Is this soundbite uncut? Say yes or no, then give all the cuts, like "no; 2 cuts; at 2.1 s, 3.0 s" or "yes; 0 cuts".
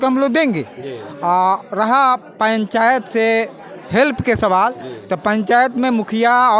yes; 0 cuts